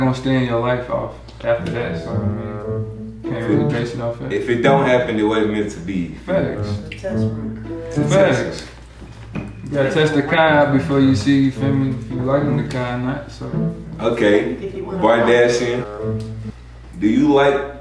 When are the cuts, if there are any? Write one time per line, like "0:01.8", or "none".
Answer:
0:16.3